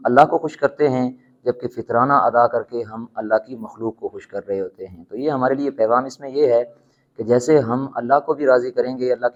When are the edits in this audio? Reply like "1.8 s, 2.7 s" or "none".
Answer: none